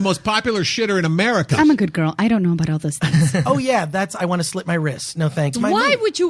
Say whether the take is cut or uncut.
cut